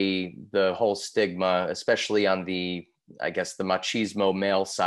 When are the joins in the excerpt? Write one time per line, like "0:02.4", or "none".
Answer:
none